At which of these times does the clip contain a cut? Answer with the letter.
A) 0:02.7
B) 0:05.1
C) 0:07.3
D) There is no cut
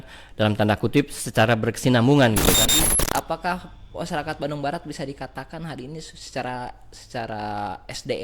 A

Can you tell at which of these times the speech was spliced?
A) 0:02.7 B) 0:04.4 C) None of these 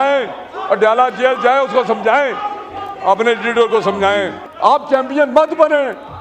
B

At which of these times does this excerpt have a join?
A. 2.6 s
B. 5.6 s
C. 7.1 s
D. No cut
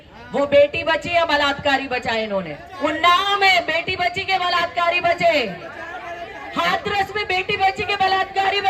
A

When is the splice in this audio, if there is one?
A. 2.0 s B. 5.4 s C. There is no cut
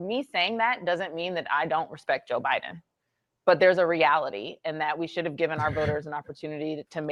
C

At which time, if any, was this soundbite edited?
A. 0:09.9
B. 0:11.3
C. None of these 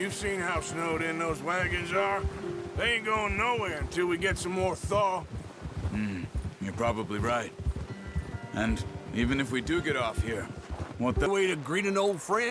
B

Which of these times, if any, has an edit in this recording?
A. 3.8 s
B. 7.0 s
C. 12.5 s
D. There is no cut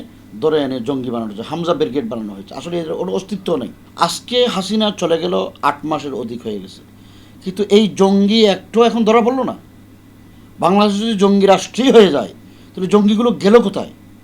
A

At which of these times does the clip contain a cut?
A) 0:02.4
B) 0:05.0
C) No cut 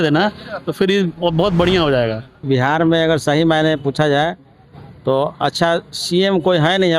A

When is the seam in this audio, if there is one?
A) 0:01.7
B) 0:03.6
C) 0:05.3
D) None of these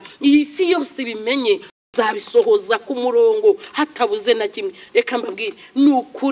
A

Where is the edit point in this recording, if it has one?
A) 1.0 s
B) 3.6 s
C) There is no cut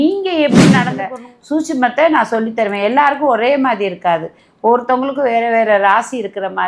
A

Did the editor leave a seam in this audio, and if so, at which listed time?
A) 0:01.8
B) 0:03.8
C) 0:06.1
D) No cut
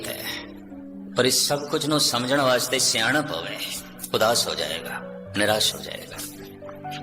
C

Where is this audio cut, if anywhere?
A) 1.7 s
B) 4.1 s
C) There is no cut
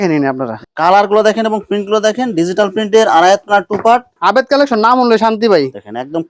B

